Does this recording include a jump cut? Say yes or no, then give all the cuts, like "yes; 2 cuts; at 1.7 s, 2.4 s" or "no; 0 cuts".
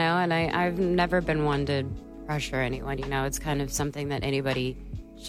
no; 0 cuts